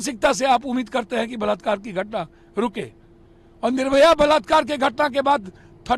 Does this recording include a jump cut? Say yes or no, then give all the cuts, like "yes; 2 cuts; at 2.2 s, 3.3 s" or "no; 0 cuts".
no; 0 cuts